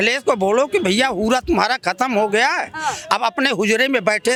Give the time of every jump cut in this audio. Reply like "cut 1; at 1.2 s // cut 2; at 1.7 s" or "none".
none